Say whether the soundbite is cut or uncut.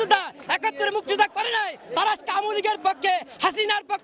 uncut